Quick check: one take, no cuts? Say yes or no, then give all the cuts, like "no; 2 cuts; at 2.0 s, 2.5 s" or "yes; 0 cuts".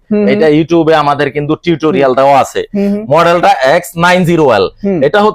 yes; 0 cuts